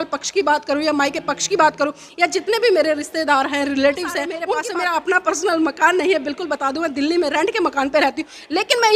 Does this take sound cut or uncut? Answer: cut